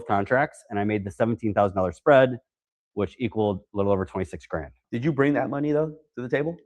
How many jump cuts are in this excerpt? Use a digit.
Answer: 1